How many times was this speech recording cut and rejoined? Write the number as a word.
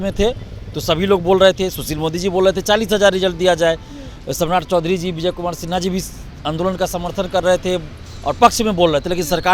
zero